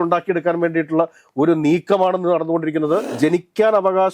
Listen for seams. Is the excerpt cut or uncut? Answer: cut